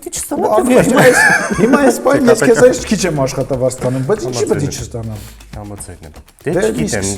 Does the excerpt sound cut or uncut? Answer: uncut